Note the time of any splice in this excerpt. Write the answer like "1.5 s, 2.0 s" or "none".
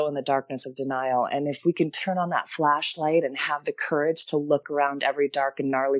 4.6 s